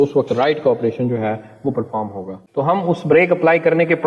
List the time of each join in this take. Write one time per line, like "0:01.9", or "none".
0:02.4

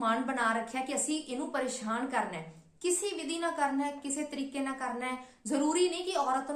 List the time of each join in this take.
none

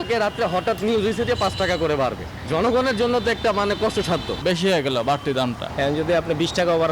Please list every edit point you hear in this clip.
0:04.3
0:05.6

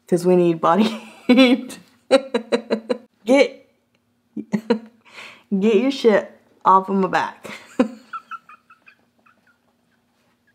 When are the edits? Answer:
none

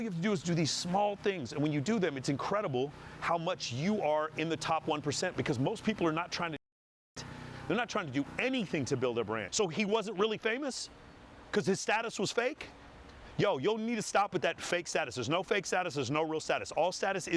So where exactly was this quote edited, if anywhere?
0:09.4

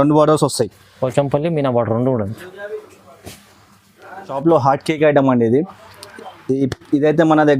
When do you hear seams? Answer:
0:04.3

